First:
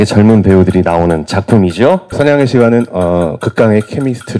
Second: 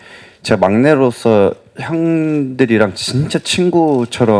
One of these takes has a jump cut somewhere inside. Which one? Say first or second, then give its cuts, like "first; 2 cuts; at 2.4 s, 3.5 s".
first; 1 cut; at 2.1 s